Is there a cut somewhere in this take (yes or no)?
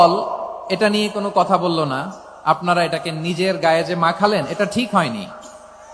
no